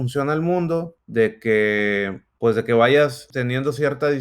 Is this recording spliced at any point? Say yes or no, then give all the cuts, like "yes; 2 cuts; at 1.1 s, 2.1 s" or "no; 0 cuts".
yes; 3 cuts; at 1.0 s, 2.2 s, 3.3 s